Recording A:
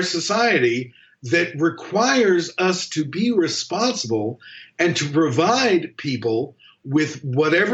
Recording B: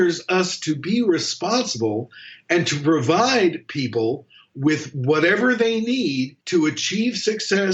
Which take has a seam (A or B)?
B